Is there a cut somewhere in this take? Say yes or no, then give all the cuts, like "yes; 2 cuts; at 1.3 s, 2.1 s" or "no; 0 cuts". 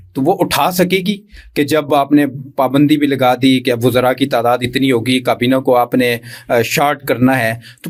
no; 0 cuts